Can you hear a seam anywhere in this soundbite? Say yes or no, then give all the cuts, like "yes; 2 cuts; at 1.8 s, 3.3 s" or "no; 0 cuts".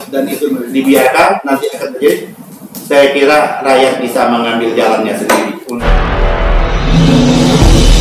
no; 0 cuts